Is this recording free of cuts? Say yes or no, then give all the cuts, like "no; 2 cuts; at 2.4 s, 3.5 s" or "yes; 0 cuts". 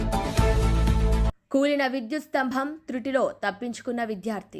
yes; 0 cuts